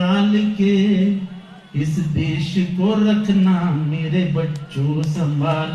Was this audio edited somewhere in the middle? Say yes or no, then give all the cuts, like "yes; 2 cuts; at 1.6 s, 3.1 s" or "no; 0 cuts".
no; 0 cuts